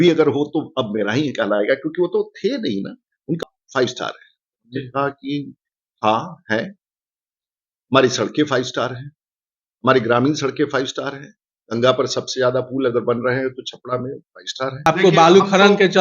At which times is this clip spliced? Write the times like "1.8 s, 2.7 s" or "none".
3.4 s, 14.9 s